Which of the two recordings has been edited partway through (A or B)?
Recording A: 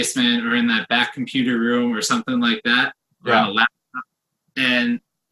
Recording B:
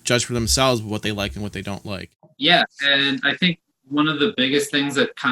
B